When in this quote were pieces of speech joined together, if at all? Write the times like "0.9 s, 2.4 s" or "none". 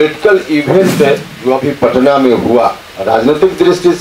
1.3 s, 2.9 s

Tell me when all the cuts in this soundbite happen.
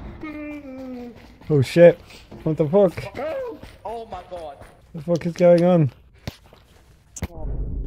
6.1 s

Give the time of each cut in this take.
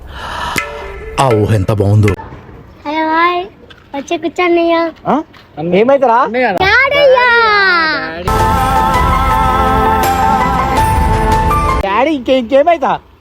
2.2 s

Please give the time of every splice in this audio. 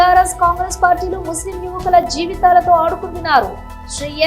none

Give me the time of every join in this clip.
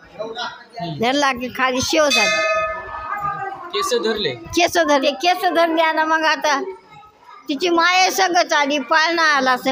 none

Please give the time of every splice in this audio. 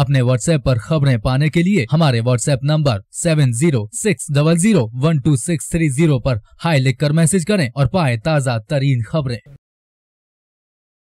none

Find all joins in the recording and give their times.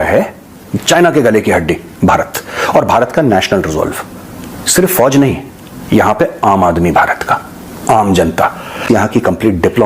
8.8 s

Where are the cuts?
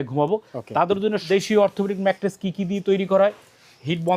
1.2 s

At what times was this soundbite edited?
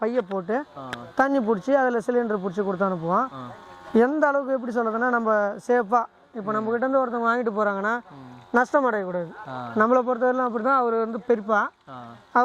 none

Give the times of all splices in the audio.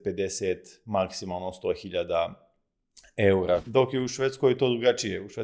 3.7 s

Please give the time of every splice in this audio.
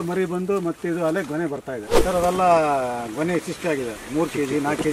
1.9 s

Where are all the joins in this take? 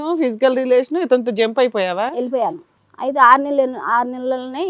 2.3 s

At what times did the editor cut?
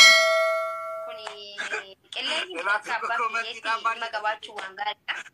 1.2 s

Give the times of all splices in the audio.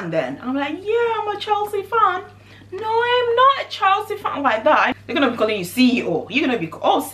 4.9 s

